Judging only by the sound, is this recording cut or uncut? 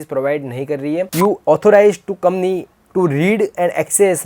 cut